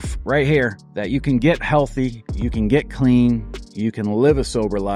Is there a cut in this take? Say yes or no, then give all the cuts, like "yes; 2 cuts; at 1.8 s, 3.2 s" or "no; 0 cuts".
no; 0 cuts